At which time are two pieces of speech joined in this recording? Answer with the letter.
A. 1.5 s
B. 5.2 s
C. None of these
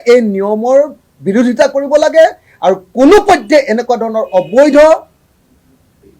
C